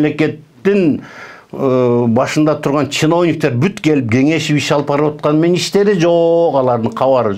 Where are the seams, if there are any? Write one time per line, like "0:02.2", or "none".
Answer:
none